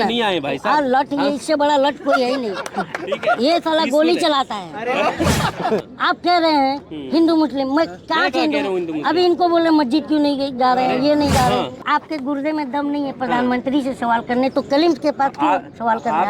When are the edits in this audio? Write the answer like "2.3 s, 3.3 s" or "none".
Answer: 5.8 s, 11.8 s

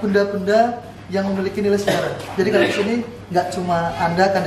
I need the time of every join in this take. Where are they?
none

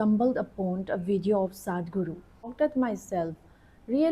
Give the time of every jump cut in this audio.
2.5 s

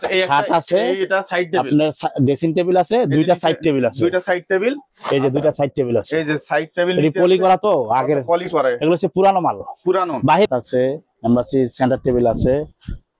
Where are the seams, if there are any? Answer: 10.5 s

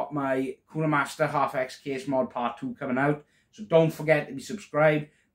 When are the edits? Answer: none

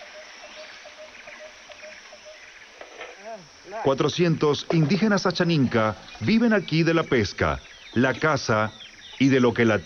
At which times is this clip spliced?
7.2 s

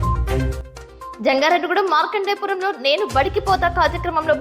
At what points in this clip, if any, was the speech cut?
1.1 s

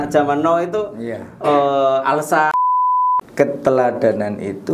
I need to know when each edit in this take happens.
2.9 s

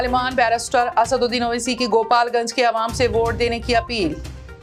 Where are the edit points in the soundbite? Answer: none

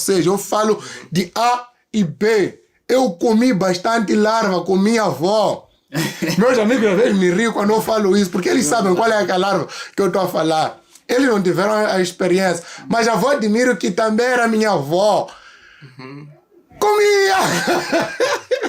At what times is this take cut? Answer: none

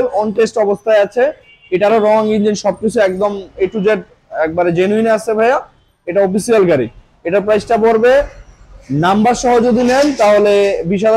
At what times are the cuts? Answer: none

